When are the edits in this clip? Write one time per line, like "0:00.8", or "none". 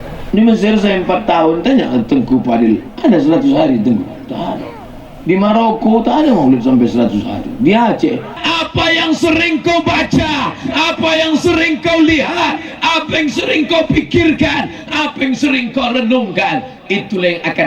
0:08.3

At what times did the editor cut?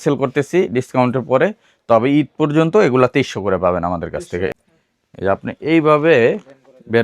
0:04.5

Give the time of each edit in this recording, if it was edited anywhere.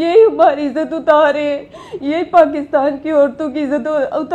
none

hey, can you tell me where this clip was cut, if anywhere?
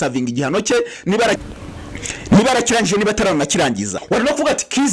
0:04.0

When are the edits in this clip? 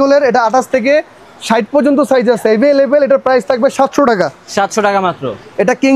none

